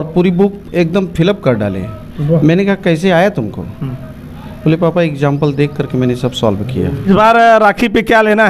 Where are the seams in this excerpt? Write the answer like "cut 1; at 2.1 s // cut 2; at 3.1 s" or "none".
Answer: cut 1; at 7.1 s